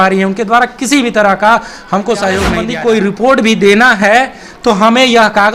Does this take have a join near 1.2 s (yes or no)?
no